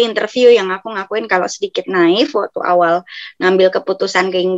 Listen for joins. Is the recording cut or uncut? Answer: uncut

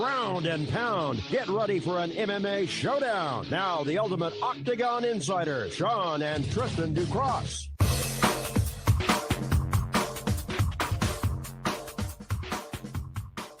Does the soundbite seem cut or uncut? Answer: uncut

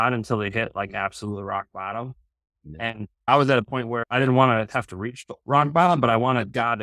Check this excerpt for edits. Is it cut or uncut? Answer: cut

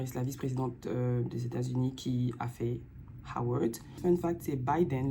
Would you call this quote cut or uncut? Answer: cut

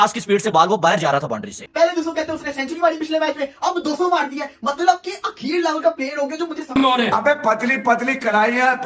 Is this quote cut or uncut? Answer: cut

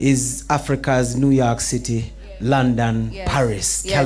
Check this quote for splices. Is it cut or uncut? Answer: uncut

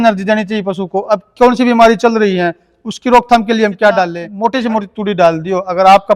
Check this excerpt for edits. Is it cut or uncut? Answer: cut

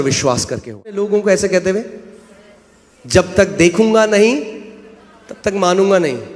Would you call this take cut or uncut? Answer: cut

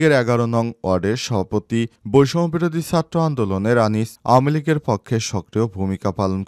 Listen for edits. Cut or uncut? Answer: uncut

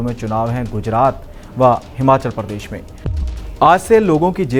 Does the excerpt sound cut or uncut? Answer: cut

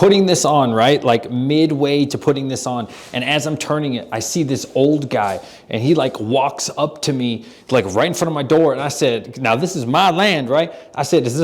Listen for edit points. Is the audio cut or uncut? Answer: uncut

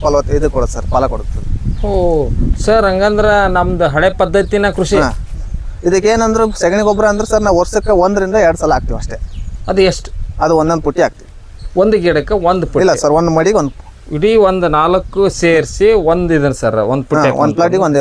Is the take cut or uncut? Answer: uncut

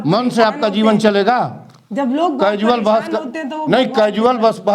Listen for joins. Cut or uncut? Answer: uncut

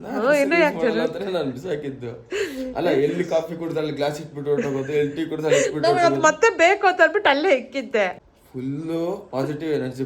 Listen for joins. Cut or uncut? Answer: cut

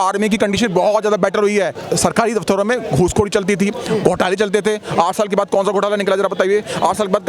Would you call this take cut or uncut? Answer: cut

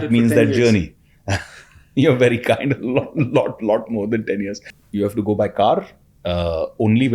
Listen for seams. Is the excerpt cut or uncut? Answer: cut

